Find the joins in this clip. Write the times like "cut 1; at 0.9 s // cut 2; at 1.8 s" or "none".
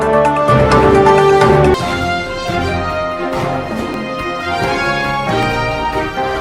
cut 1; at 1.4 s